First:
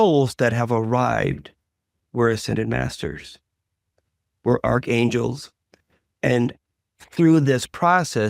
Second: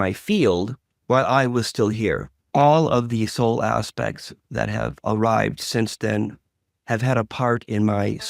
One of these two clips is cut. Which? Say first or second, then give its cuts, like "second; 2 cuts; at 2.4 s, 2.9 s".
second; 1 cut; at 2.3 s